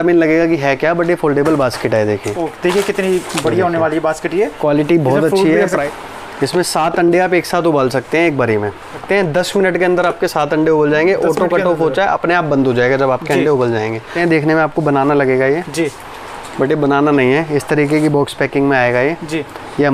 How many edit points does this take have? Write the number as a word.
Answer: three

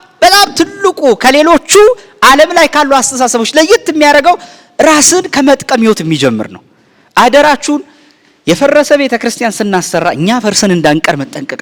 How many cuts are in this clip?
zero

